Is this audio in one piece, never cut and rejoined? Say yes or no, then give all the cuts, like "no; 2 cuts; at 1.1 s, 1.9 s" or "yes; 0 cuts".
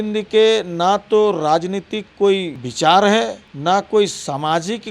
no; 2 cuts; at 2.6 s, 3.4 s